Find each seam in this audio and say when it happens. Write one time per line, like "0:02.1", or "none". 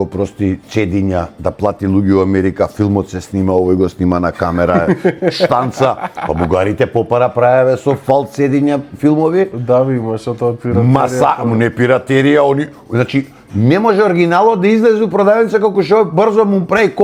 none